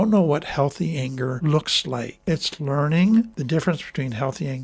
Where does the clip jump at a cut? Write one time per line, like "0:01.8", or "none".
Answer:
0:01.4
0:02.2
0:03.4